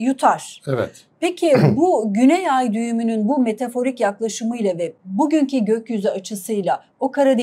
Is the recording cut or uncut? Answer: uncut